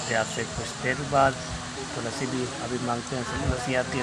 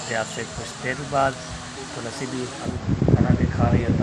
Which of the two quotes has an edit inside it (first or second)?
second